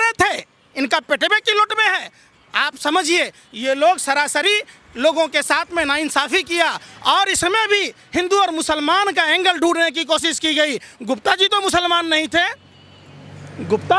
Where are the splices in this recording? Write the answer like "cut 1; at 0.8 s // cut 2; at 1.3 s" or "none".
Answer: none